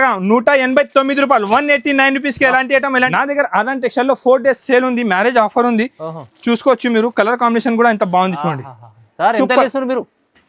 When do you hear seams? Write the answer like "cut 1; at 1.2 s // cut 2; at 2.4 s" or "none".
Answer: cut 1; at 3.1 s